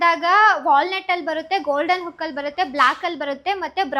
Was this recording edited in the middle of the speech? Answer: no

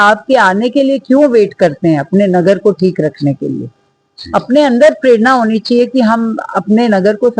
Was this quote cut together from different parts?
no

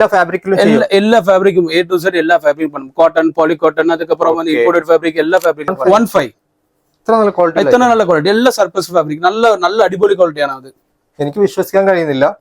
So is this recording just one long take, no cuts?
no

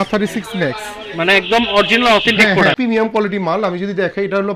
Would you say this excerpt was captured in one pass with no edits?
no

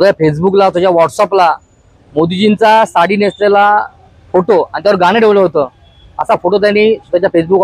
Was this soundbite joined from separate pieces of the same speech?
no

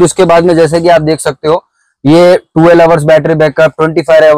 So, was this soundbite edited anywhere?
no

